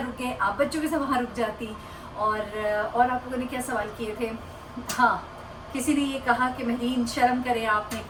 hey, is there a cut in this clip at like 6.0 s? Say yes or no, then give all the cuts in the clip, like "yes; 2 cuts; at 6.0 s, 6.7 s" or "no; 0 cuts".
no; 0 cuts